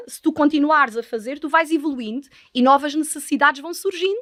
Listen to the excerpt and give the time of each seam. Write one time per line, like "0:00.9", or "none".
none